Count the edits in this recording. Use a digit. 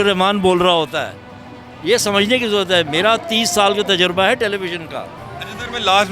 0